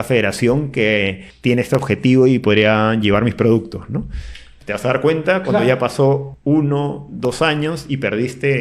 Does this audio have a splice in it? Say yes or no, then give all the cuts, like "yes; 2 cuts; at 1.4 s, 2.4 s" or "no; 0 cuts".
yes; 2 cuts; at 1.2 s, 6.3 s